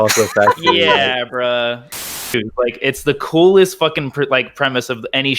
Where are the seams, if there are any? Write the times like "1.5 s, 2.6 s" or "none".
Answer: 2.2 s